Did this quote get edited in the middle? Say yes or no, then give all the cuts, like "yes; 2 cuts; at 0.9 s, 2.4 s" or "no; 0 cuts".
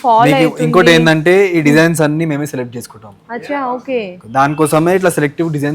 no; 0 cuts